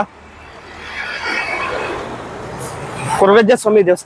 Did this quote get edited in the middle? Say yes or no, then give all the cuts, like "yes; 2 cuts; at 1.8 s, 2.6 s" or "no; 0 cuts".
no; 0 cuts